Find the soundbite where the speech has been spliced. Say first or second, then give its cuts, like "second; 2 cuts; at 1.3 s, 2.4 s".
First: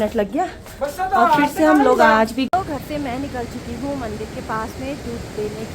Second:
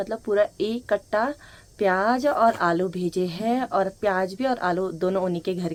first; 1 cut; at 2.5 s